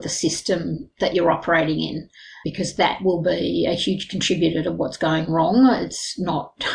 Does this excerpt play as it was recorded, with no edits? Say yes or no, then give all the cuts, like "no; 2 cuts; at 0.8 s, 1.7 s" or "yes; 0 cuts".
yes; 0 cuts